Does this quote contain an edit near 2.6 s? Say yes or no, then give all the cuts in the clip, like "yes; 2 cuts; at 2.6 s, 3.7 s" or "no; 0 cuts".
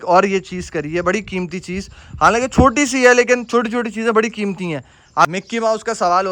no; 1 cut; at 5.2 s